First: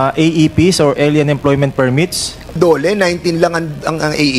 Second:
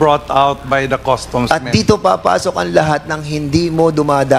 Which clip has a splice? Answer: first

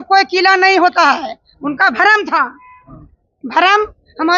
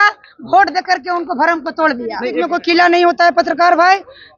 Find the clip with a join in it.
second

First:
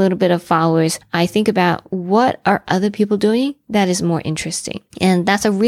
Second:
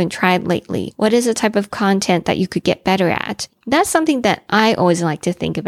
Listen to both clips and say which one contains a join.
second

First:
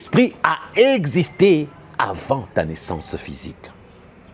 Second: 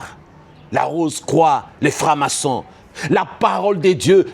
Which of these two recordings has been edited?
second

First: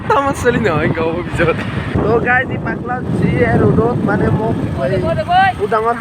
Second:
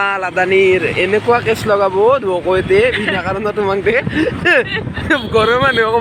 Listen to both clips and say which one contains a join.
first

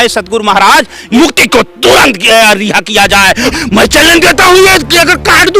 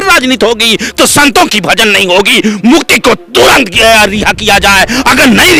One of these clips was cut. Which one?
first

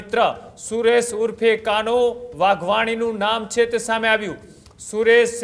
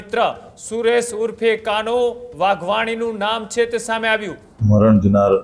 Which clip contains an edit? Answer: second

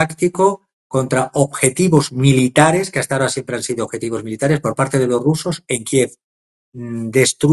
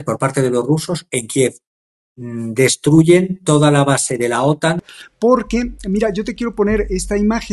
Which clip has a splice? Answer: second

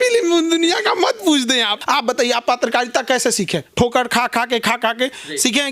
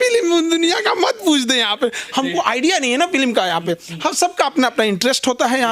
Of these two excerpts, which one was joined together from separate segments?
first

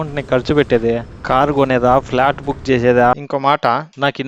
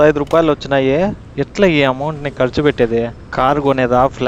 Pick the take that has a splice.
first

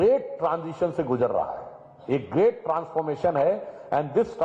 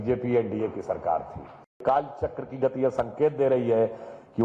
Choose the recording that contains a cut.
second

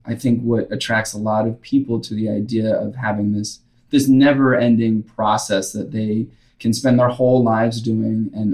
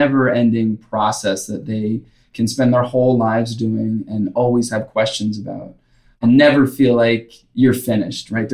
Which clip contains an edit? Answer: second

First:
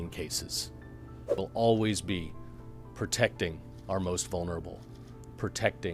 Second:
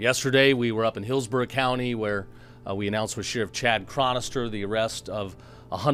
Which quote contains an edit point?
first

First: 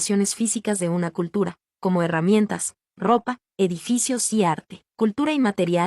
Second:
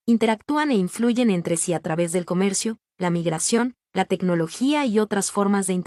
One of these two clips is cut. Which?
first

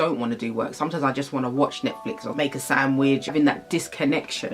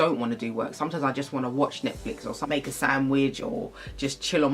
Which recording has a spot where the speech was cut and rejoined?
first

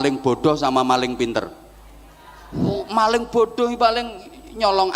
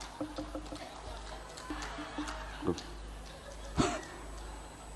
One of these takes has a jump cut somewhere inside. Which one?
second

